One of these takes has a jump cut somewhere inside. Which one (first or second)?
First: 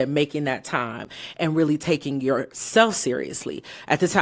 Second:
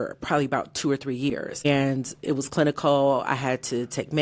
second